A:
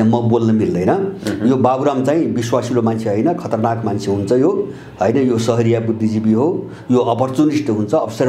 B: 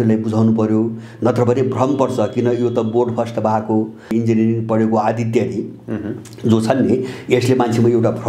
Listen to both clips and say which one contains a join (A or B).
B